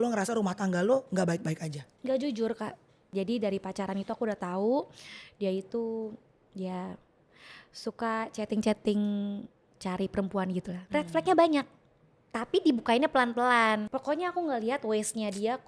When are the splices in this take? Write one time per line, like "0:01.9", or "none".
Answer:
0:03.1
0:10.8
0:13.9